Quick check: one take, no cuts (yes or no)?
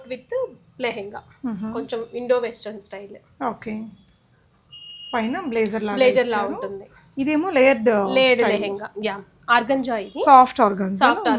yes